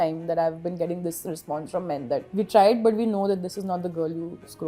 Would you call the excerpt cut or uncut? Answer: cut